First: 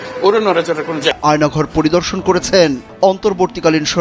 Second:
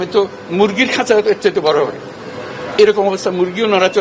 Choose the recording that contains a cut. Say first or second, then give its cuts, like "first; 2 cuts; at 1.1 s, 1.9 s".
first; 1 cut; at 1.2 s